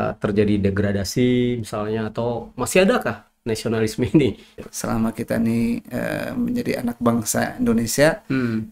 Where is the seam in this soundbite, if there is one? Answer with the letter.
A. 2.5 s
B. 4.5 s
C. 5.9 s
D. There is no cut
B